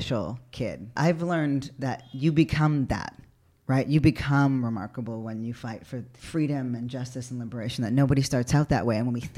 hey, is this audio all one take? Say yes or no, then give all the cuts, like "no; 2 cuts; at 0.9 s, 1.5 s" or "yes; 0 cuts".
no; 3 cuts; at 0.9 s, 2.1 s, 6.2 s